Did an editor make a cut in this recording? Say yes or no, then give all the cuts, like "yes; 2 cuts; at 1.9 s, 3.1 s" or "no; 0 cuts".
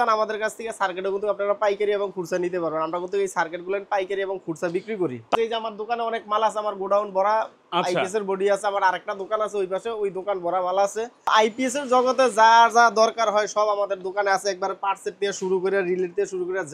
yes; 2 cuts; at 5.3 s, 11.3 s